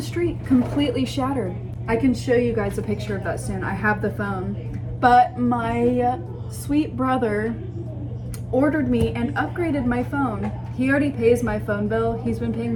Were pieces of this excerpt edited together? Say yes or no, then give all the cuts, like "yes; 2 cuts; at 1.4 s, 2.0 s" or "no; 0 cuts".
no; 0 cuts